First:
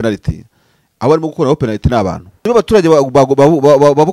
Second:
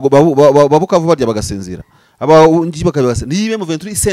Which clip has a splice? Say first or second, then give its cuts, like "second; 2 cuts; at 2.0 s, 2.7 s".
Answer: first; 1 cut; at 2.3 s